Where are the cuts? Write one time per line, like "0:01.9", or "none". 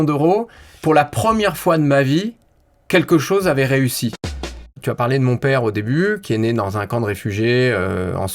0:04.3